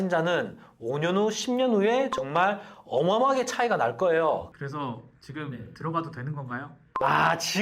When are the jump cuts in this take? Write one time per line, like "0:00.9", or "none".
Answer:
0:04.5